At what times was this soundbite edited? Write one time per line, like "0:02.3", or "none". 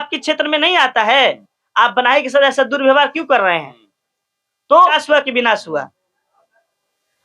0:04.9